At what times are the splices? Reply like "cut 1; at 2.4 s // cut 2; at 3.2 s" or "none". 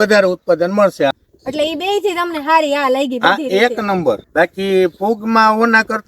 cut 1; at 1.1 s // cut 2; at 4.2 s